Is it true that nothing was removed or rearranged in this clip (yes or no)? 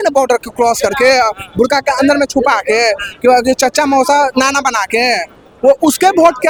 yes